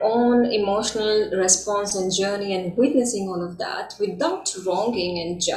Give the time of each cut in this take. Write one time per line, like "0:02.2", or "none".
none